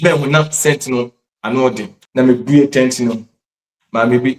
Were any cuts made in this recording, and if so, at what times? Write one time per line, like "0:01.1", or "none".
0:01.9